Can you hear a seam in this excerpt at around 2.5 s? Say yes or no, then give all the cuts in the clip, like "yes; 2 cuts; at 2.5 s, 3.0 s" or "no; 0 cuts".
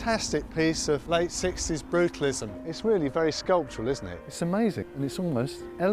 no; 2 cuts; at 1.0 s, 4.3 s